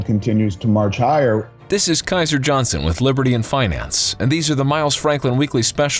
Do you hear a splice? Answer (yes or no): yes